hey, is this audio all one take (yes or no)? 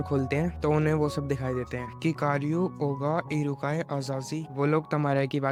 yes